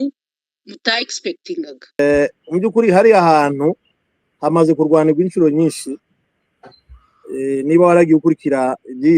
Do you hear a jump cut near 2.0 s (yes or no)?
yes